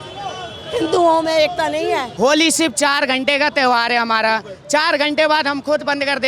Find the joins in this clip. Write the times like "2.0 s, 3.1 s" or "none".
2.1 s